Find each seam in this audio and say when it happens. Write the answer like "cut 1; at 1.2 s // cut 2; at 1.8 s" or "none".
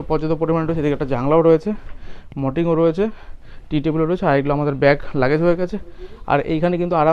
none